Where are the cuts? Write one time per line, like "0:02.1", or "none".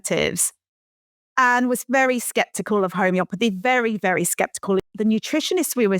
0:04.8

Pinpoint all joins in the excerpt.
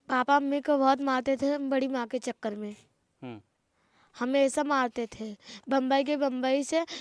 none

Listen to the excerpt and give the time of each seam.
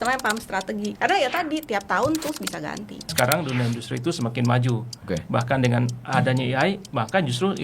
0:01.0
0:03.1

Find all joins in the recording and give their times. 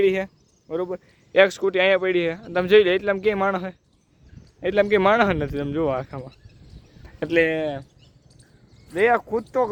none

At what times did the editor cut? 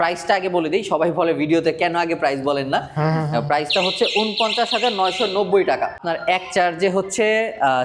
none

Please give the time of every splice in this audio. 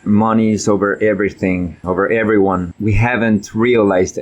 0:01.8
0:02.7

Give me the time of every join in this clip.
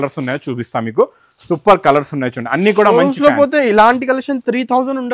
none

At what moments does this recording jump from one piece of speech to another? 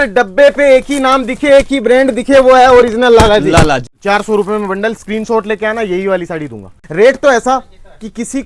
0:03.9
0:06.8

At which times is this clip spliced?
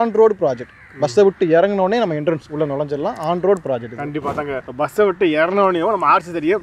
none

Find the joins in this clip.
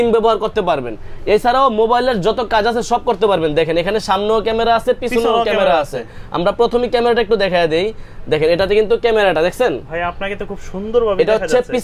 none

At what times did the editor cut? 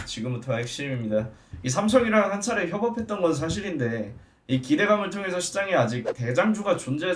0:01.4

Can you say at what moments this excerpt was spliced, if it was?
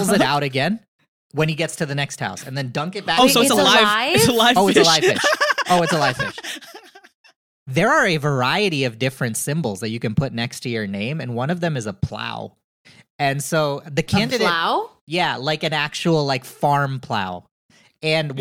0:07.1

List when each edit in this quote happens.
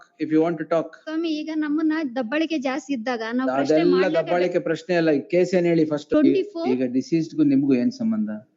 0:06.1

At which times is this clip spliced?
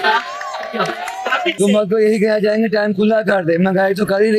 0:01.6

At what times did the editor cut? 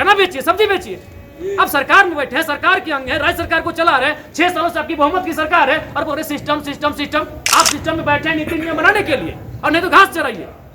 0:07.4

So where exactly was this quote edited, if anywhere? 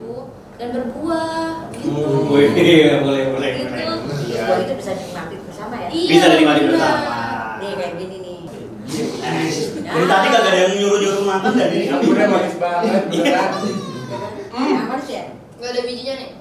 none

